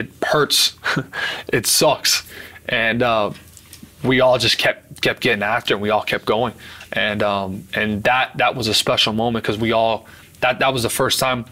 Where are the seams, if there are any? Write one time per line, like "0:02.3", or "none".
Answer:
none